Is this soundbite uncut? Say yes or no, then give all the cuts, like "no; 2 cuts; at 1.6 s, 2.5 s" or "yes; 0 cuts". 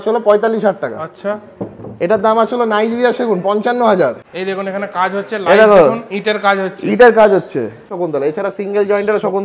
no; 2 cuts; at 4.2 s, 7.9 s